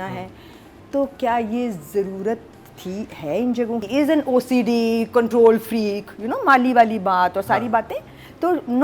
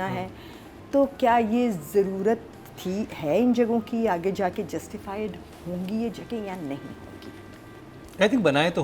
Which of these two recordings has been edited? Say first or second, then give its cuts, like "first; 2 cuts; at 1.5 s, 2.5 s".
first; 1 cut; at 3.9 s